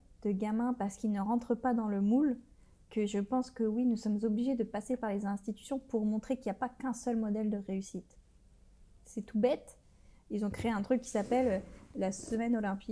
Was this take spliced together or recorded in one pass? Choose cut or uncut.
uncut